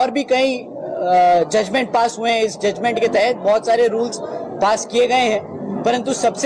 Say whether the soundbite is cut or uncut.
uncut